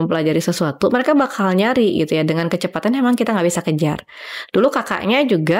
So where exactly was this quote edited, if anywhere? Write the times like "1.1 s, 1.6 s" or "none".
none